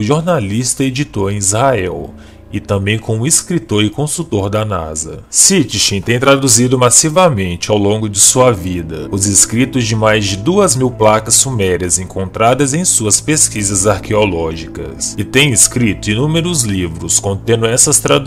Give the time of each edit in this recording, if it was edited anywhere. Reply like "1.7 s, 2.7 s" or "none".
none